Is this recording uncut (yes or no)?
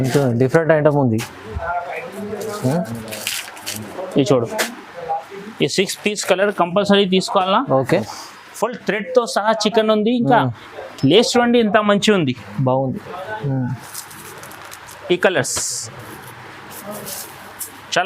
no